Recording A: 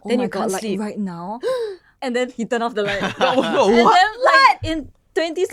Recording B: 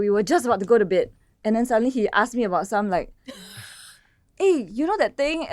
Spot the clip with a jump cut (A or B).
B